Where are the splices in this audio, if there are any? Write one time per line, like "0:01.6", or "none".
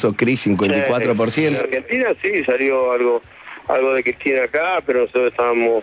0:01.6